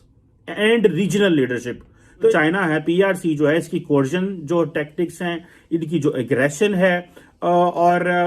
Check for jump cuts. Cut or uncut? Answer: cut